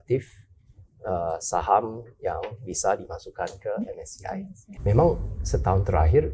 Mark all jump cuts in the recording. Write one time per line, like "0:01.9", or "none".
0:04.6